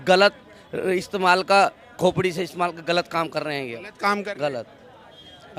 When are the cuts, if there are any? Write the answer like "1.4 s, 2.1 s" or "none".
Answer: none